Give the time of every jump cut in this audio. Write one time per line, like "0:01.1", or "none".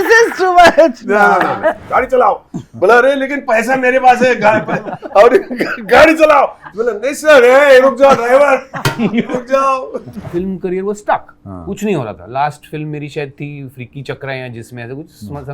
0:01.8
0:10.2